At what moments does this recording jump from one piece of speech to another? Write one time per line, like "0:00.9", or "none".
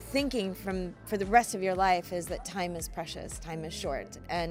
none